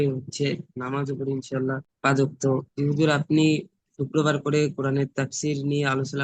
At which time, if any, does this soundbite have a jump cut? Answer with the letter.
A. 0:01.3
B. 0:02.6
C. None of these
C